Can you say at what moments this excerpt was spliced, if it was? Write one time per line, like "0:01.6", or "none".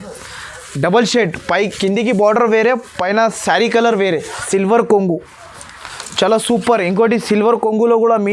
0:04.3

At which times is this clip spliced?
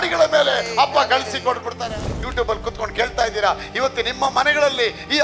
0:01.8

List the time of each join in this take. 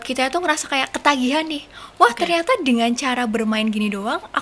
none

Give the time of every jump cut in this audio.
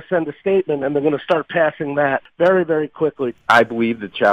0:02.2
0:03.4

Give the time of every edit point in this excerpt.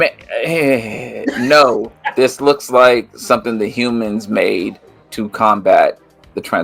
0:01.9

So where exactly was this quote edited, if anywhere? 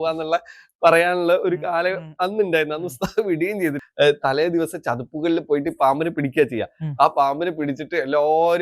0:03.8

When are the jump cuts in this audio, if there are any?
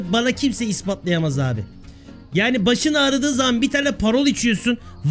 none

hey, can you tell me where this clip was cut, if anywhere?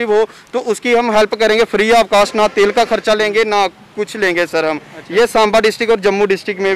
none

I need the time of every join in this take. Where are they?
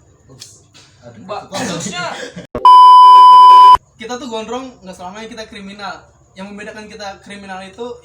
0:02.4
0:03.9

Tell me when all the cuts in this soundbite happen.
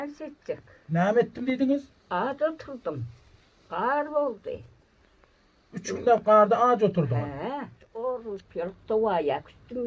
0:07.8

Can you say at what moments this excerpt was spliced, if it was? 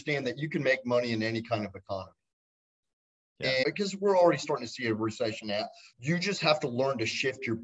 0:03.6
0:05.8

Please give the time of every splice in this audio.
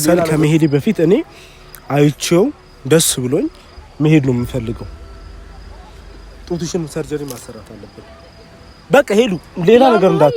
none

